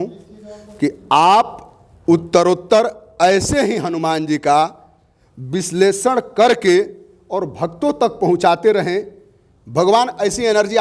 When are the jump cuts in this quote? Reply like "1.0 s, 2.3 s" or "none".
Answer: none